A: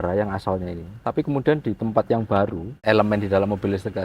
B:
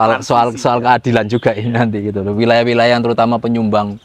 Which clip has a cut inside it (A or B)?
A